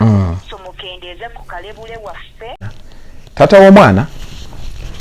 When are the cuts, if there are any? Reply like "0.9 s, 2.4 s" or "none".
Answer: 2.6 s